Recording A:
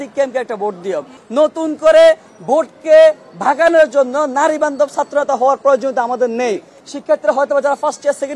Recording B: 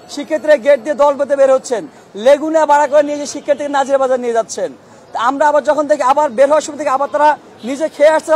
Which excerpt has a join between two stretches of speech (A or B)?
A